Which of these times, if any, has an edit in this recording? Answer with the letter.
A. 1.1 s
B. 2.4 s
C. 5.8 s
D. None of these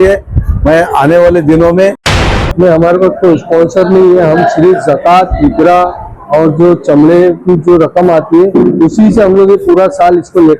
B